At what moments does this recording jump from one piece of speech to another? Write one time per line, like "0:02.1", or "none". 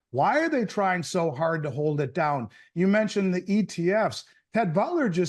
none